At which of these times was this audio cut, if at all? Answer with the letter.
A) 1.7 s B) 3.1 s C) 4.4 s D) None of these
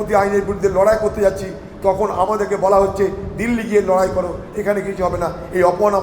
C